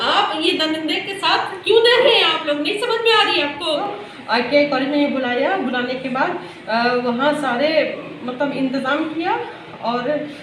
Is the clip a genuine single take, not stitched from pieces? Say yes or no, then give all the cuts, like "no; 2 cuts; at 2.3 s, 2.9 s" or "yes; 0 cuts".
no; 1 cut; at 3.8 s